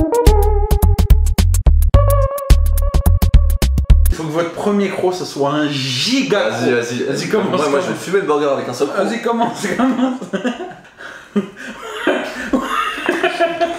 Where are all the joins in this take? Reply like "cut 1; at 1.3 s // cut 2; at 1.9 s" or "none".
cut 1; at 4.1 s